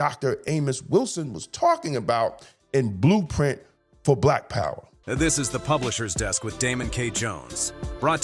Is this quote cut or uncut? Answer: cut